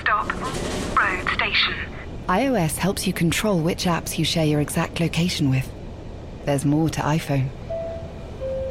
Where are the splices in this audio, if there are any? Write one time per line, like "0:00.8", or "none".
none